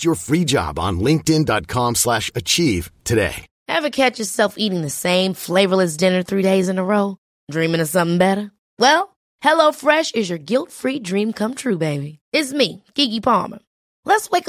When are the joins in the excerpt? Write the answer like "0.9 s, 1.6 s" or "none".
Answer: none